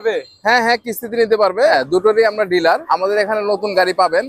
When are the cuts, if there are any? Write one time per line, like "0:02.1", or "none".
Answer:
0:01.7
0:02.8